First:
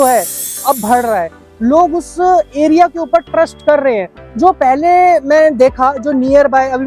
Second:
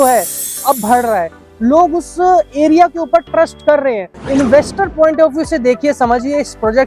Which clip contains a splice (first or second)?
second